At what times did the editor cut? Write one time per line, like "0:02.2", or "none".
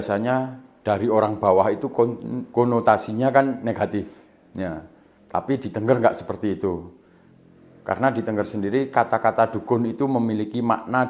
none

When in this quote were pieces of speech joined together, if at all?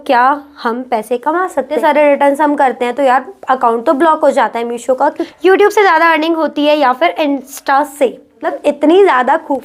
0:01.7
0:05.2
0:08.5

